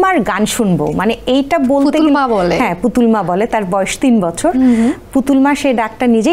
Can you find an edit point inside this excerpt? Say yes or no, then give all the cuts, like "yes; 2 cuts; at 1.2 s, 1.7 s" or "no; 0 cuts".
no; 0 cuts